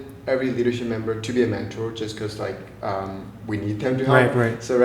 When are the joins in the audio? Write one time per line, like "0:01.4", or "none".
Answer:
none